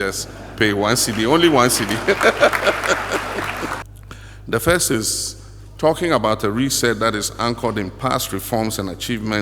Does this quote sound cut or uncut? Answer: cut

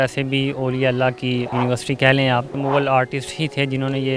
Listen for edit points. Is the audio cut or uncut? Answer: cut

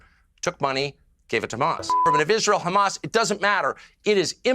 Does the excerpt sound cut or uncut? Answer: cut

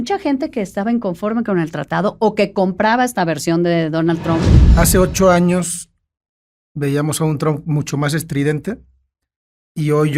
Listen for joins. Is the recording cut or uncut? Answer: cut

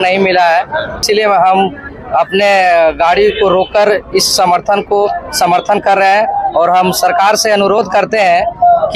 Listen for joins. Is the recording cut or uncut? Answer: cut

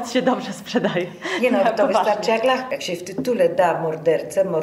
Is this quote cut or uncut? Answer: cut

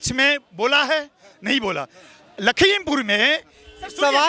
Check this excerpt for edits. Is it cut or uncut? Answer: uncut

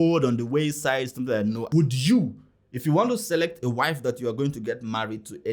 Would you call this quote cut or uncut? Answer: cut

